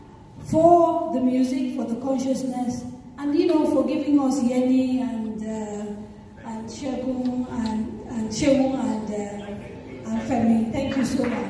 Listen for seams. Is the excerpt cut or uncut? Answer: uncut